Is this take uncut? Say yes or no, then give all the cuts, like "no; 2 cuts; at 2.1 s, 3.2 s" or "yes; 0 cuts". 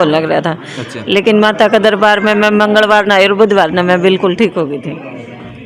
yes; 0 cuts